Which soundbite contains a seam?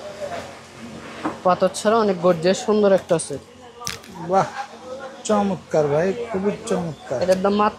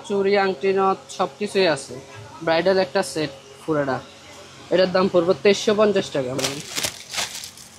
second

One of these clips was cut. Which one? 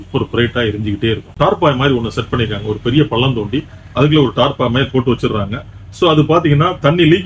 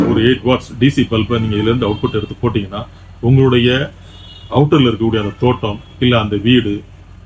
first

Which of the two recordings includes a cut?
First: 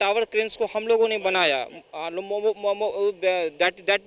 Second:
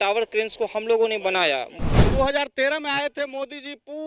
second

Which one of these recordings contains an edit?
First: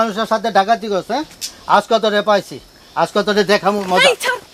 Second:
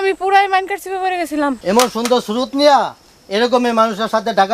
second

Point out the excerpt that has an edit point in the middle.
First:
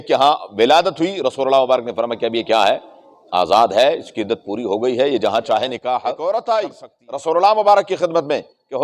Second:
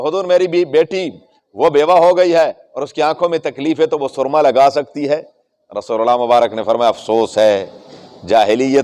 first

